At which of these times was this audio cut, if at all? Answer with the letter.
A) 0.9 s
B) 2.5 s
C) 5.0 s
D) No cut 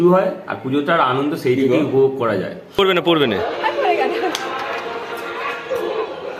B